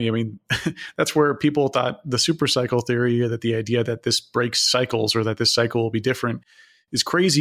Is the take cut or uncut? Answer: uncut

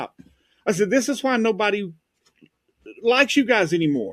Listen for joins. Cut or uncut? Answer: uncut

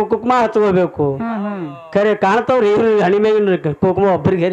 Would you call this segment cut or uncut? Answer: uncut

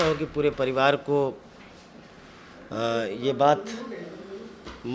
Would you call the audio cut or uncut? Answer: uncut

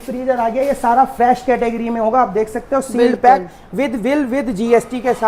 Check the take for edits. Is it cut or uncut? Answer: uncut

